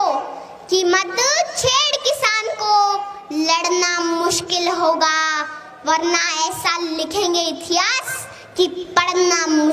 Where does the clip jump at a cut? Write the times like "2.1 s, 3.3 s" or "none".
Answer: none

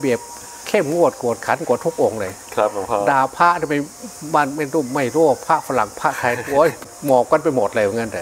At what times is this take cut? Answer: 6.9 s

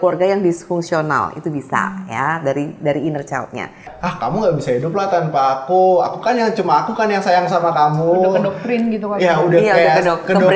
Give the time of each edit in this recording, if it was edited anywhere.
3.9 s

